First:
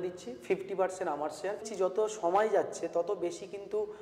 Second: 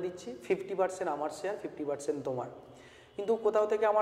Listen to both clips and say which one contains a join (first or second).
first